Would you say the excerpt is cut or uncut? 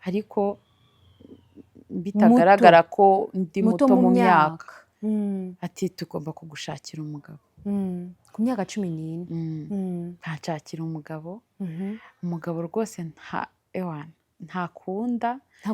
uncut